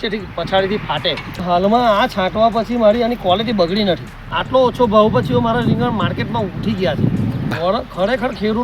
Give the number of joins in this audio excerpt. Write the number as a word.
three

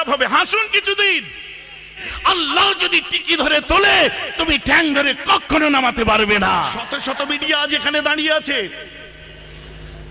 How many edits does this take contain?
two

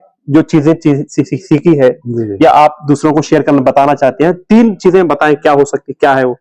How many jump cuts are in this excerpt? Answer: zero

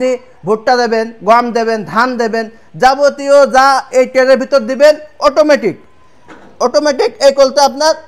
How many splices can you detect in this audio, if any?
zero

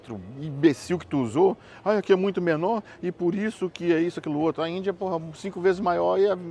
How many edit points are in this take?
zero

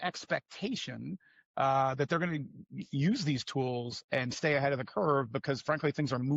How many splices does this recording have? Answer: zero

